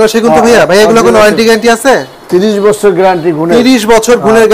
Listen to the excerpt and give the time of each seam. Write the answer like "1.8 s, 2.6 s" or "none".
none